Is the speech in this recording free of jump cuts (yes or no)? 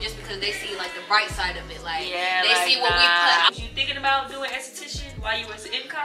no